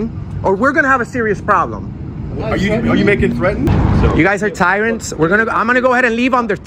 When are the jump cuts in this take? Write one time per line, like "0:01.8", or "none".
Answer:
0:03.7